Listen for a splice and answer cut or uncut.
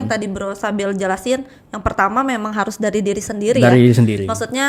uncut